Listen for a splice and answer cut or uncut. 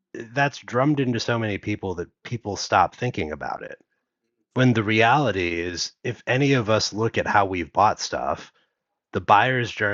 uncut